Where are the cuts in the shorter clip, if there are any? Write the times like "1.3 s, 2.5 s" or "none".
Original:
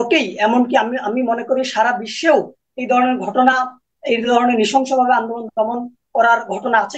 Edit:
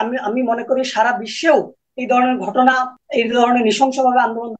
2.9 s